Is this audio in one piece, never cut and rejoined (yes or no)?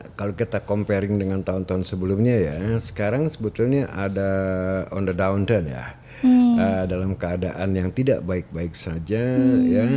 yes